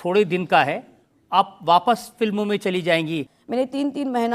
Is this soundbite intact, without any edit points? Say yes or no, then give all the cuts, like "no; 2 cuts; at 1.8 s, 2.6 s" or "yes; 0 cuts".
no; 1 cut; at 3.4 s